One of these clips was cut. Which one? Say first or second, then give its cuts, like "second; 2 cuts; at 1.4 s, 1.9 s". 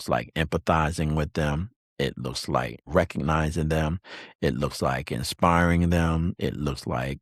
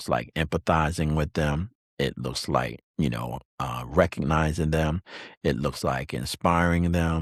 first; 1 cut; at 2.8 s